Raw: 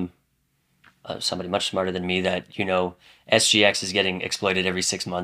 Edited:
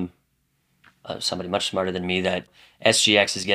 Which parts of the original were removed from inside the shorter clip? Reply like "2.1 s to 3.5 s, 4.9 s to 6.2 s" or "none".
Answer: 2.5 s to 3.0 s